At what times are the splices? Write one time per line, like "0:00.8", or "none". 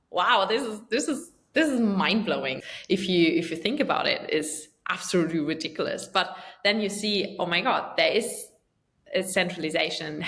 0:02.6